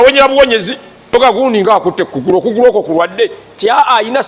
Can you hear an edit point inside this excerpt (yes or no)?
yes